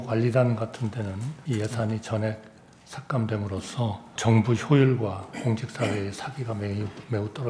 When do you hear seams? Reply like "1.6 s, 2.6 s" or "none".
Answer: 1.3 s, 4.2 s